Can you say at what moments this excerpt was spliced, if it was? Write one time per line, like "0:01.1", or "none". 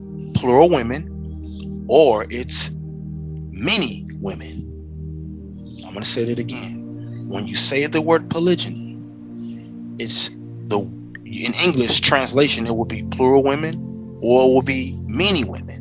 0:04.1
0:05.9